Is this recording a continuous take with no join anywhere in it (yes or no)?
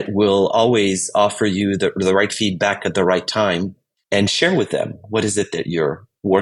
yes